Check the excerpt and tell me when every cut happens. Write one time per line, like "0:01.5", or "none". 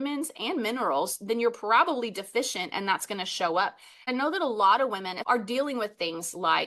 0:04.1
0:05.1